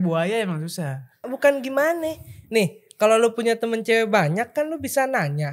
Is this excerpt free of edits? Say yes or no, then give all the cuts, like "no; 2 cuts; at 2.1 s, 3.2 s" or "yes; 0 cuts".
no; 1 cut; at 1.3 s